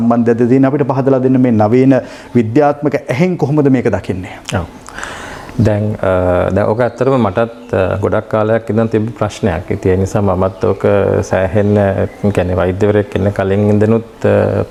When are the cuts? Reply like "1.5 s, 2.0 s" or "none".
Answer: none